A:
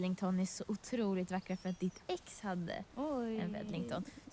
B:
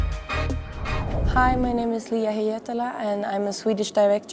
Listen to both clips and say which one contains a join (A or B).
A